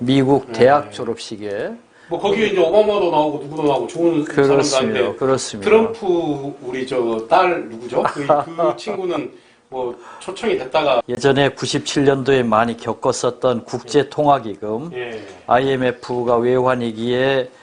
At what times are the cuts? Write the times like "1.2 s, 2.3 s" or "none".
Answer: 11.1 s